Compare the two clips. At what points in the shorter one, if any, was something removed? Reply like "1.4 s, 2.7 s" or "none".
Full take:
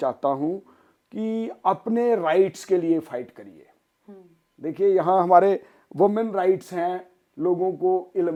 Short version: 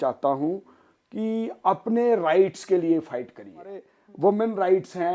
4.0 s